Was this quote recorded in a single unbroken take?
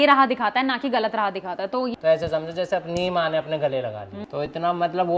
no; 2 cuts; at 1.9 s, 4.2 s

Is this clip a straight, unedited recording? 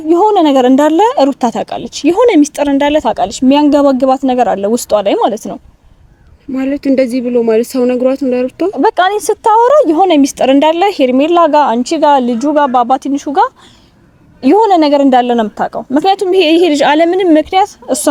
yes; 0 cuts

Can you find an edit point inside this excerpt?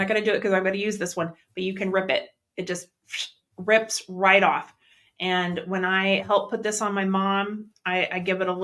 no; 0 cuts

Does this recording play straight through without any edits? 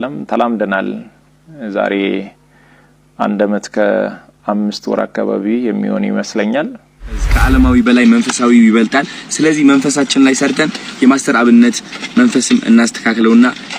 no; 1 cut; at 7.3 s

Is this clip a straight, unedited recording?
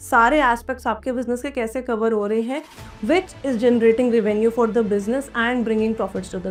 yes; 0 cuts

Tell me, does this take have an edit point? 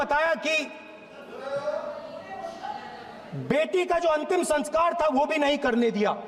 no; 0 cuts

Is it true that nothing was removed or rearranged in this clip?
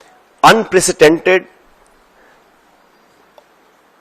yes; 0 cuts

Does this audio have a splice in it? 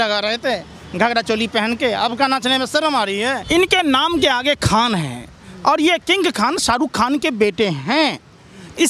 yes; 1 cut; at 3.4 s

